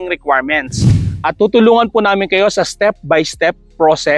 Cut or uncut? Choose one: cut